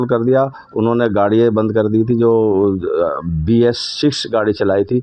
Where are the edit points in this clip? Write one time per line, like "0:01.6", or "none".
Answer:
none